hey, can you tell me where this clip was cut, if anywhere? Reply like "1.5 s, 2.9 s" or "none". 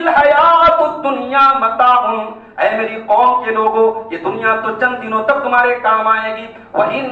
none